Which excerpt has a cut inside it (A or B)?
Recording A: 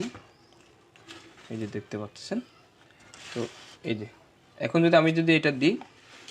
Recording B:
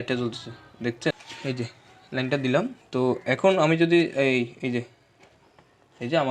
B